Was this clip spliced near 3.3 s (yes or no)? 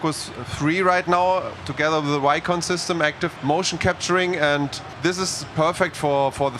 yes